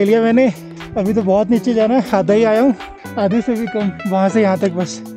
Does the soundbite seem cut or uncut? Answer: uncut